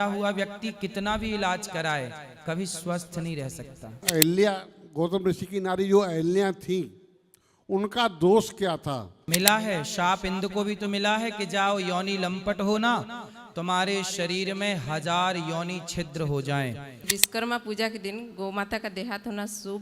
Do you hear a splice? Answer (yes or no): yes